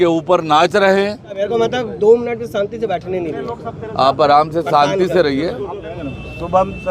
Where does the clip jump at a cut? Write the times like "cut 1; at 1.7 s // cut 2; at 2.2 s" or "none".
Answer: cut 1; at 1.4 s // cut 2; at 5.8 s